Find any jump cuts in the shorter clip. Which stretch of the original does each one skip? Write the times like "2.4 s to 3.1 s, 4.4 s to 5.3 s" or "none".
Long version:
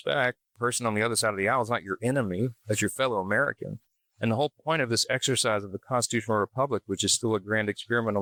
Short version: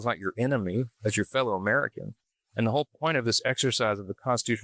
none